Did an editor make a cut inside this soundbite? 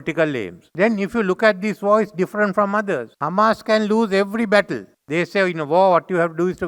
no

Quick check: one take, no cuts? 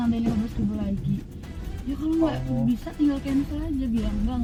yes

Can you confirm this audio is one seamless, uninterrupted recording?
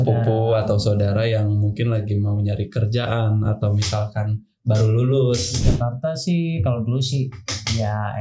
no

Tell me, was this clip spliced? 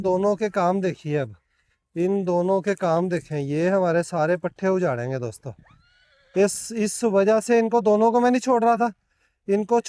no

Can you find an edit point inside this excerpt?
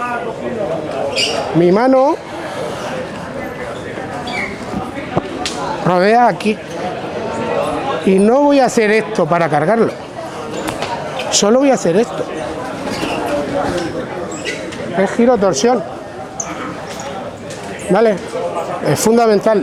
no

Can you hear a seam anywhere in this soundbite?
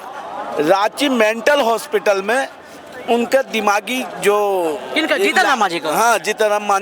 no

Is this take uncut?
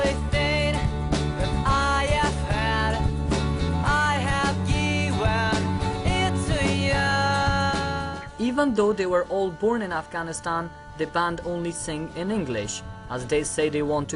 no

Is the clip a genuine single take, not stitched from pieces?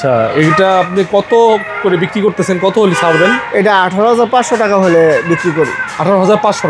yes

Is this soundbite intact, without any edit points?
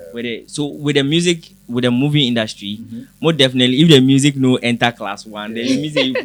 yes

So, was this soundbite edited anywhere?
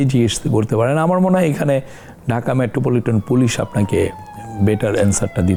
no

